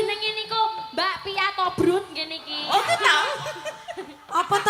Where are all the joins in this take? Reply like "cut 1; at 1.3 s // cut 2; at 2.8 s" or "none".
none